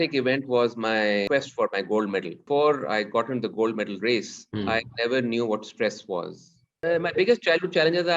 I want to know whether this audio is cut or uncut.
cut